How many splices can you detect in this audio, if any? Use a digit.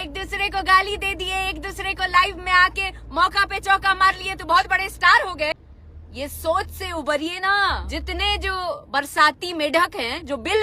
2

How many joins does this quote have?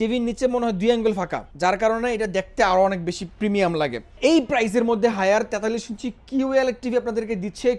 2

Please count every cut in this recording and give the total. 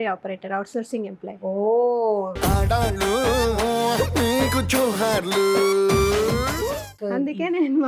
0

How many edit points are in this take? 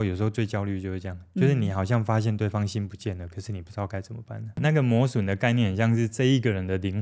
1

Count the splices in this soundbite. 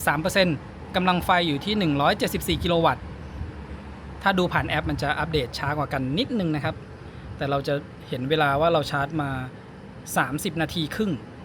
0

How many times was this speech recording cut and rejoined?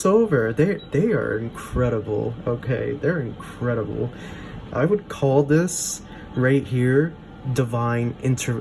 0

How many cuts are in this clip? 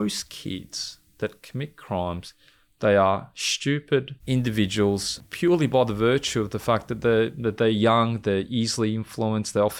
2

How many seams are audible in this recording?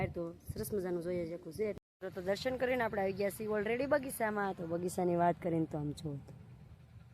1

